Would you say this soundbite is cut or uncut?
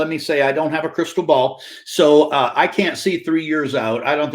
uncut